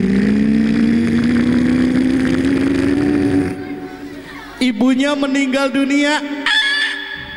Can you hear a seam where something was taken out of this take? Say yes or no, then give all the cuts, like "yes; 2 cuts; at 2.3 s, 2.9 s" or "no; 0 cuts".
no; 0 cuts